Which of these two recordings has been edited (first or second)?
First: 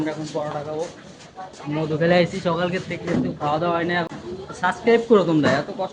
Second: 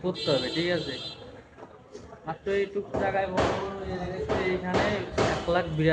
first